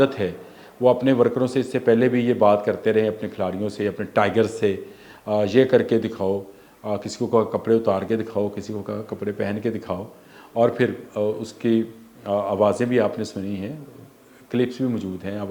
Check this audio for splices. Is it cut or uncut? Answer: uncut